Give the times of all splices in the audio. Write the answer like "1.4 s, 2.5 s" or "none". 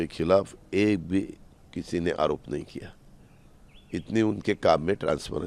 none

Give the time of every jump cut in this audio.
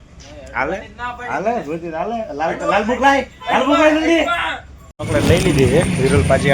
4.9 s

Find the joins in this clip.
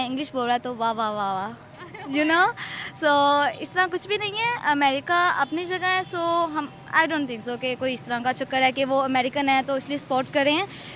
none

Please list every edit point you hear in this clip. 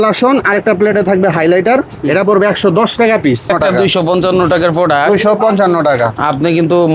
3.5 s

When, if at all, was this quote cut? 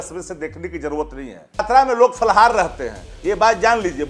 1.6 s

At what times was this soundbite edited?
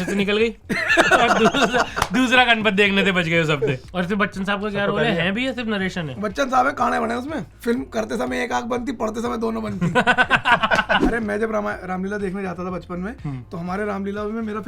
3.9 s, 7.5 s, 11.0 s

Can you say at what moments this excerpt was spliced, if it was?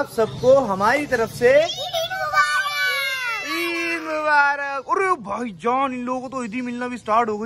none

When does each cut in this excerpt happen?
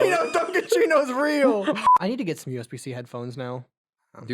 1.8 s

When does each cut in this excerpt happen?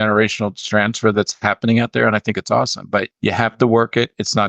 3.1 s

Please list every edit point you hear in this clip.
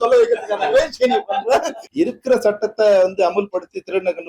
1.8 s

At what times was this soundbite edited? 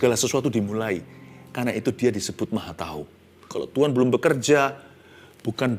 3.5 s

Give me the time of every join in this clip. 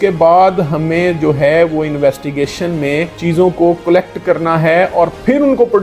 none

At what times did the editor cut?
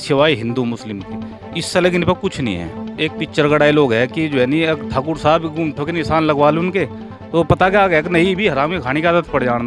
2.9 s

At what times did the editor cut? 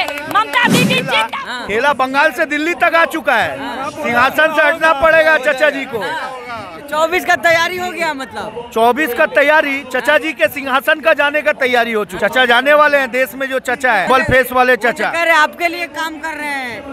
1.2 s, 12.1 s, 14.1 s

